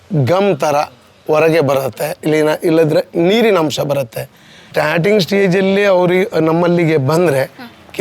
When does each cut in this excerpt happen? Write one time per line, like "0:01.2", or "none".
0:04.7